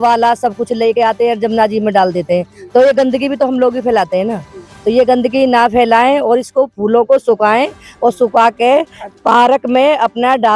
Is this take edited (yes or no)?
no